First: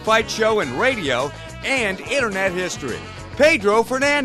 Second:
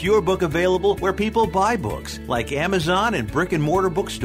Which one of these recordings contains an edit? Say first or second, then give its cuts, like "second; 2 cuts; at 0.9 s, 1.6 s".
first; 1 cut; at 3.2 s